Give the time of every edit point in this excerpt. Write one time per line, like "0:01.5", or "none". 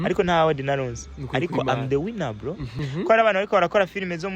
0:02.7

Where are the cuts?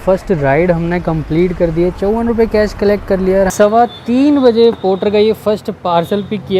0:03.5

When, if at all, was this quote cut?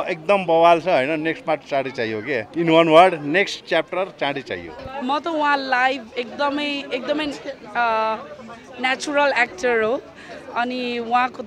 0:04.8

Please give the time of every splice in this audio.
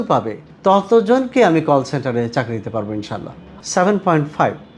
0:03.4

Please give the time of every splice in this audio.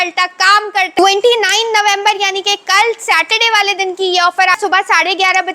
0:01.0
0:04.6

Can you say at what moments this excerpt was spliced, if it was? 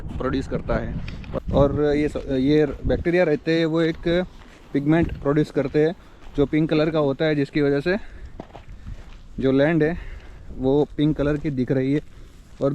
0:01.4

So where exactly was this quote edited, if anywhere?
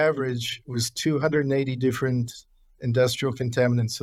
none

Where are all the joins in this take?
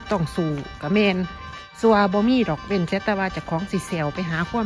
0:01.8

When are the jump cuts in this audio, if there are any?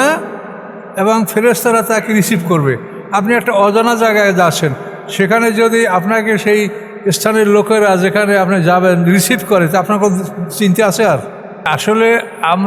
0:11.7

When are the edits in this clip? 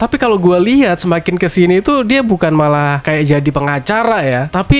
none

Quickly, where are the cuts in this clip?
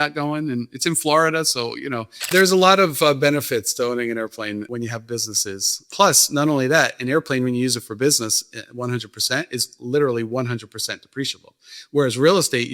0:02.2
0:04.7
0:05.8

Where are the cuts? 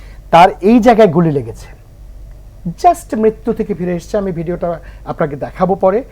none

